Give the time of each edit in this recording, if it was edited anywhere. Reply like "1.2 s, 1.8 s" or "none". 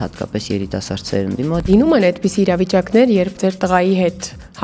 1.6 s, 3.3 s